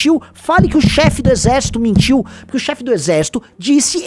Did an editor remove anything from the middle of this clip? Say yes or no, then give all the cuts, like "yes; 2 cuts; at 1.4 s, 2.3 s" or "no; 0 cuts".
no; 0 cuts